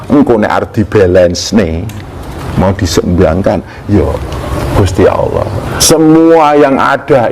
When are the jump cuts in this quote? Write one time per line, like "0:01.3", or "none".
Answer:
0:05.8